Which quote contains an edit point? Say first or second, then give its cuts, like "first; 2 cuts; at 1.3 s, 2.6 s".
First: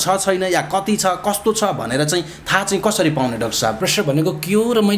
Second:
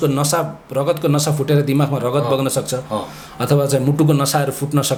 first; 1 cut; at 3.8 s